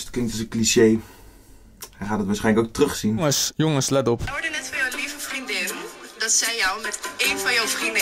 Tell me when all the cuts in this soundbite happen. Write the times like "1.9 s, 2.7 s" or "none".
3.2 s